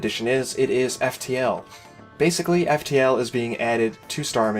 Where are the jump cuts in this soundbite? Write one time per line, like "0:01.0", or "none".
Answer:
0:02.3